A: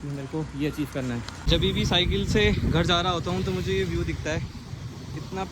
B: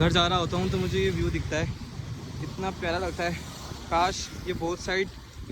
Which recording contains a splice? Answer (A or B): A